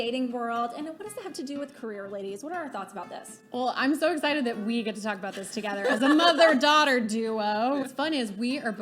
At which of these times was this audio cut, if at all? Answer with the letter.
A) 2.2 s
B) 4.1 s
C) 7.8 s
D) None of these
C